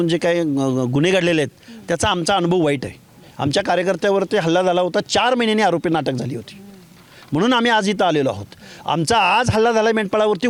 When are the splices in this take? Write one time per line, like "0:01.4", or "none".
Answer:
none